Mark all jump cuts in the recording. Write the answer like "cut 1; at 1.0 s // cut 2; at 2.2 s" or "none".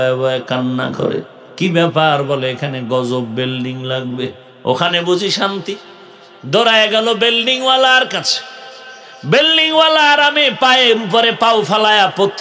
cut 1; at 4.5 s

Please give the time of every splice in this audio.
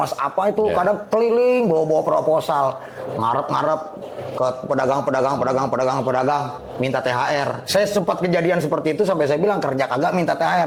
none

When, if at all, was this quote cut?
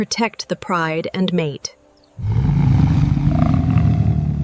none

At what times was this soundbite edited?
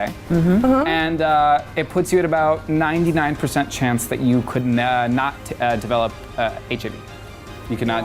none

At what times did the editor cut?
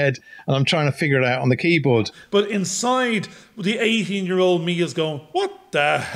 cut 1; at 2.2 s

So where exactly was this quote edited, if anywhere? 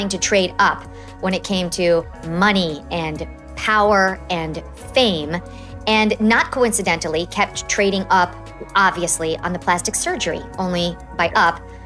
none

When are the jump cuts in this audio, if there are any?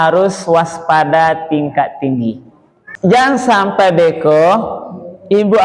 cut 1; at 3.1 s

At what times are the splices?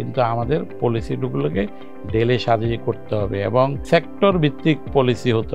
cut 1; at 3.8 s

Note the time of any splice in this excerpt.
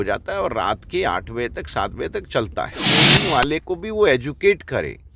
cut 1; at 2.8 s

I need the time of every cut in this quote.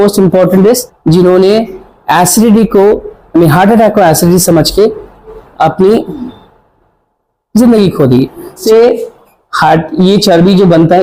cut 1; at 0.9 s // cut 2; at 8.6 s

